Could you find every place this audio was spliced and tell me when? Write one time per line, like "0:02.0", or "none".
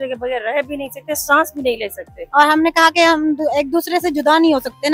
0:02.2